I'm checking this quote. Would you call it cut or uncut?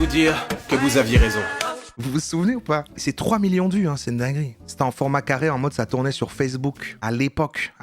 cut